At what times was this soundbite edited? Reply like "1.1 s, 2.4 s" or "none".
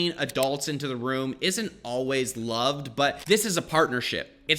3.2 s